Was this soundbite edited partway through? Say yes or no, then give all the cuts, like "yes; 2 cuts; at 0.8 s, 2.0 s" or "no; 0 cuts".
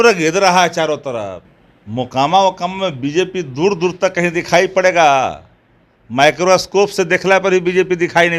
yes; 1 cut; at 1.4 s